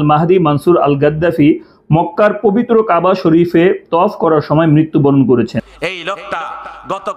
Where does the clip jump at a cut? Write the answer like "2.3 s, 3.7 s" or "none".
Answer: 5.6 s